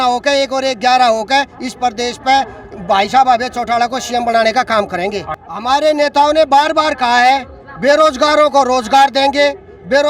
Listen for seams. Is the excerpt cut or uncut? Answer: cut